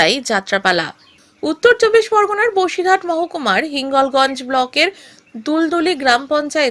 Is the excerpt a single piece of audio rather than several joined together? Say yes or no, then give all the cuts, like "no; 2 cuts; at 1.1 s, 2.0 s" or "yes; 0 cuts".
yes; 0 cuts